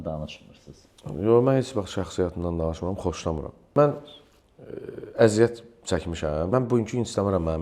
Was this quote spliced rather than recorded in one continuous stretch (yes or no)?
yes